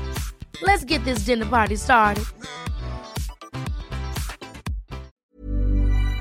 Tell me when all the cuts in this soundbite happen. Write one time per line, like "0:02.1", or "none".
0:05.1